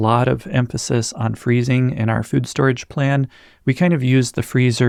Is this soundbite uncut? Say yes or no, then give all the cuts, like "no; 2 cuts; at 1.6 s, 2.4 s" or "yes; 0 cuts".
yes; 0 cuts